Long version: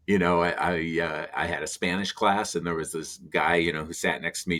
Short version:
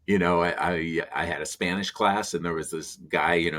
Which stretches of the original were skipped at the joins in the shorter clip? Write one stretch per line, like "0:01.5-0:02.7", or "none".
0:01.0-0:01.2